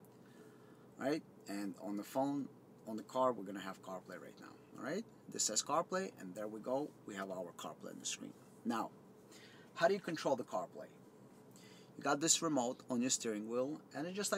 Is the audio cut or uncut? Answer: uncut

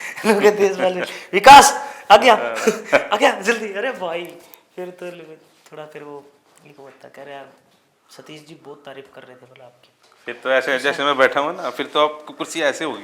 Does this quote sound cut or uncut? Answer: uncut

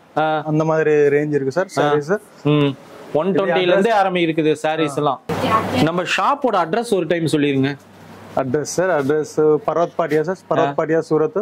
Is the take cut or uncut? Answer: uncut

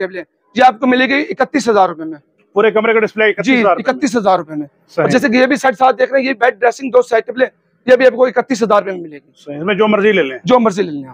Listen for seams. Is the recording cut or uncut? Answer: uncut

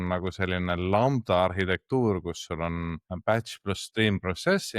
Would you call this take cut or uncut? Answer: cut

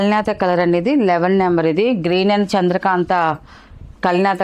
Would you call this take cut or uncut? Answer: uncut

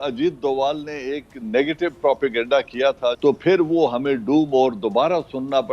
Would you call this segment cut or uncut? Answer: cut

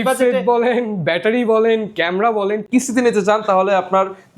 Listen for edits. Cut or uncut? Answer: cut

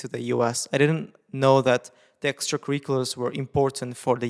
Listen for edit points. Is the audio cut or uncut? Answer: uncut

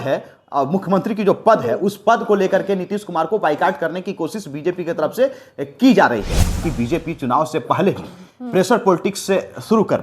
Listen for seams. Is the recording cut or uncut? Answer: cut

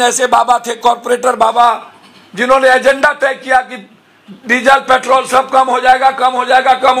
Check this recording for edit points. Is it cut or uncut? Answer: uncut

